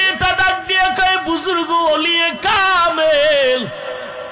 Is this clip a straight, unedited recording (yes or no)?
yes